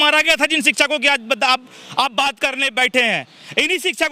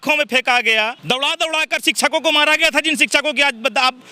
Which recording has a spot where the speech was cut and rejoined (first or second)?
second